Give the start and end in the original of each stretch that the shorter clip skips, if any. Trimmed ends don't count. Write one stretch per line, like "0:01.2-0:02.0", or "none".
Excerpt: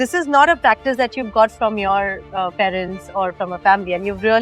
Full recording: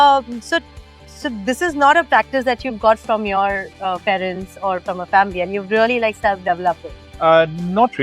none

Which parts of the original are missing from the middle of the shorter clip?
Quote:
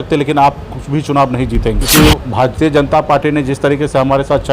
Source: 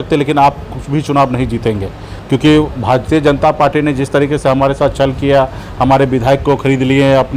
0:01.8-0:02.3

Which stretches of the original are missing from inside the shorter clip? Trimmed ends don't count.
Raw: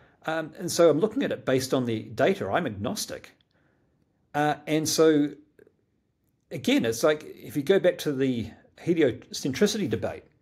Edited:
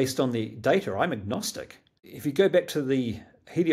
0:03.6-0:07.4

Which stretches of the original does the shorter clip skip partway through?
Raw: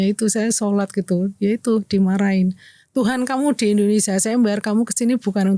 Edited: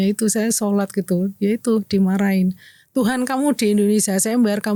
none

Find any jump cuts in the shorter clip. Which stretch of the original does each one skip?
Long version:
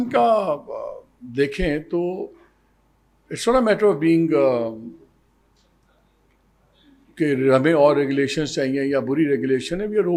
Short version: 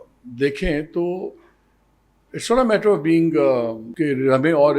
0:04.8-0:07.0

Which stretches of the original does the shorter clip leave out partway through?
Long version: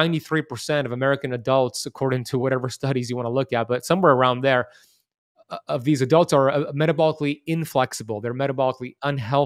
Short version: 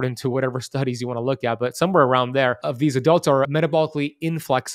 0:04.7-0:05.7
0:06.5-0:06.7

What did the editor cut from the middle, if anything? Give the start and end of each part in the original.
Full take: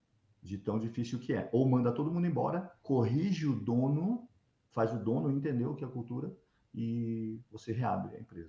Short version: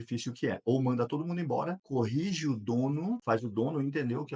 0:02.7-0:02.8
0:04.2-0:04.7

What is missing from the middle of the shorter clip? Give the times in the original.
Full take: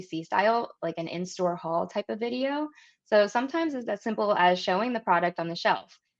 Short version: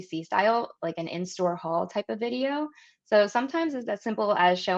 none

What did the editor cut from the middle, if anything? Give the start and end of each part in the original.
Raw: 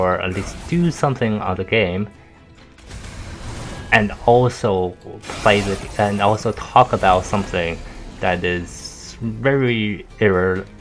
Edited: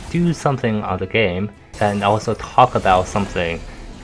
0:02.2-0:05.8

